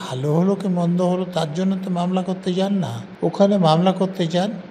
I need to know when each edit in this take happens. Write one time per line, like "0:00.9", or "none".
0:03.0